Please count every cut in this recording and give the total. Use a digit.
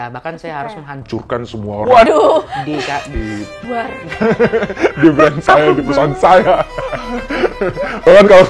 0